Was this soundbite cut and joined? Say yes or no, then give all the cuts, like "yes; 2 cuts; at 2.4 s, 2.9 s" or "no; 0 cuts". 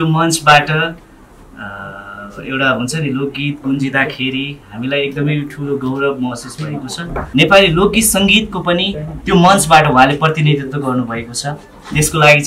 yes; 1 cut; at 7.2 s